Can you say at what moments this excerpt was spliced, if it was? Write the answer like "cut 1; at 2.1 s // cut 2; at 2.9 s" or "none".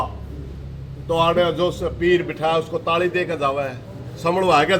none